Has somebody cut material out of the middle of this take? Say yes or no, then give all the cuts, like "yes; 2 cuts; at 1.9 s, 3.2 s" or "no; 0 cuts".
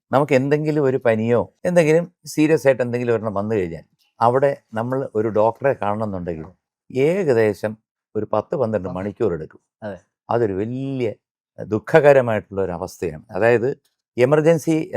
yes; 2 cuts; at 1.6 s, 2.2 s